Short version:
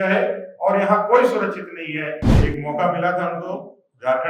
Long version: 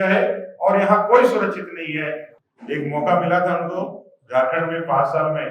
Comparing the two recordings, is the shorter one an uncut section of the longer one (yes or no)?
no